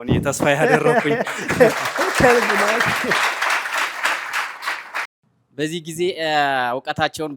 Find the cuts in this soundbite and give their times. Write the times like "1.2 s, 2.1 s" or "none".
5.2 s